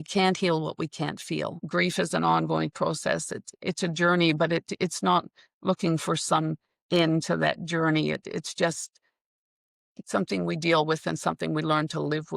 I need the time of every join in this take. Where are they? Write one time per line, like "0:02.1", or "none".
0:01.6